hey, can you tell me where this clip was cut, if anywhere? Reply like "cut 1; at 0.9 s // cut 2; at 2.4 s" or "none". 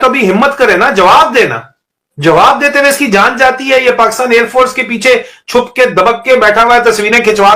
none